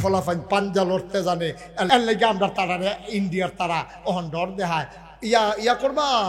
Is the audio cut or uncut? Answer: cut